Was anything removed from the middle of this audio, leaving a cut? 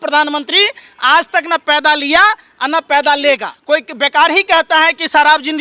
yes; 1 cut; at 3.5 s

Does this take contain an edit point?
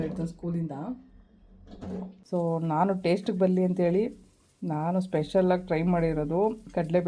yes; 1 cut; at 2.1 s

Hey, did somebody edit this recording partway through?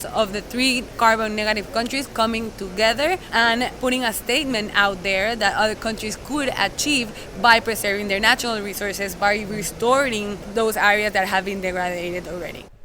yes; 3 cuts; at 3.6 s, 9.1 s, 10.4 s

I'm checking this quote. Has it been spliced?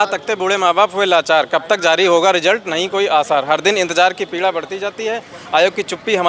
no; 0 cuts

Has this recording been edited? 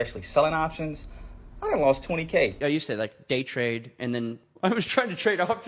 yes; 1 cut; at 2.5 s

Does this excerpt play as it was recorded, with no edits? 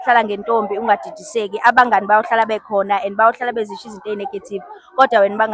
yes; 0 cuts

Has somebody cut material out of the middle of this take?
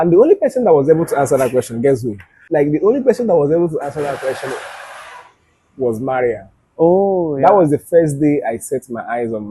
yes; 1 cut; at 2.4 s

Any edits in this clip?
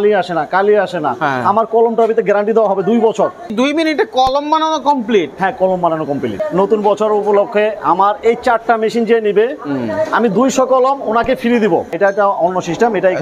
yes; 3 cuts; at 3.5 s, 6.4 s, 11.9 s

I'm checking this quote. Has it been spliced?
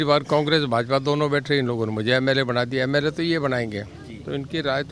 no; 0 cuts

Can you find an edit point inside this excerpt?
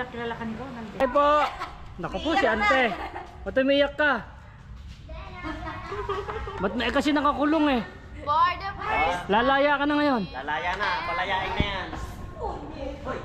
yes; 1 cut; at 1.0 s

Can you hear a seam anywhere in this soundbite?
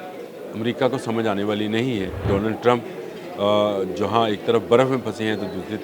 yes; 1 cut; at 2.3 s

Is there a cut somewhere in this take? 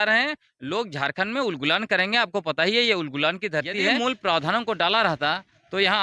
yes; 1 cut; at 3.9 s

